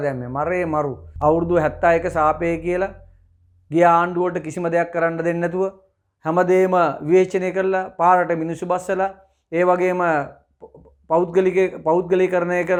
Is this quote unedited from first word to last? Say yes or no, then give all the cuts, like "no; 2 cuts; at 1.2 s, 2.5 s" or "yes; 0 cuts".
yes; 0 cuts